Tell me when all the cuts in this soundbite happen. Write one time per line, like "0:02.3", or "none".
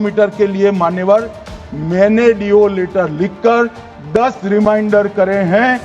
none